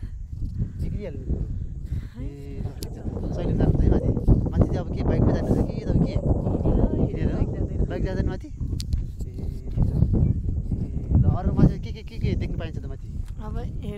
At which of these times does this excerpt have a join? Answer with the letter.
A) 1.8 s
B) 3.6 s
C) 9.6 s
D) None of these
D